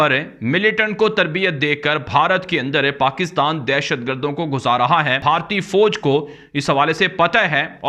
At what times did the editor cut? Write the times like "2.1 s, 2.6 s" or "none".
5.1 s